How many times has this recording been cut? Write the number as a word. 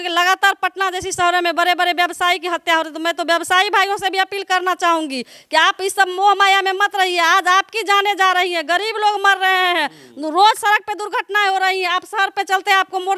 zero